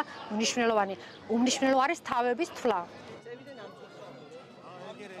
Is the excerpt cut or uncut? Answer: uncut